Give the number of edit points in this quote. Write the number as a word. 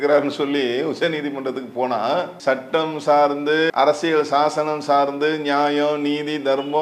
two